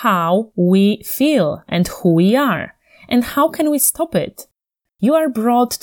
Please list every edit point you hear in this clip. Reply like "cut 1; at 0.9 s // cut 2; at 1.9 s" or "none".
cut 1; at 4.7 s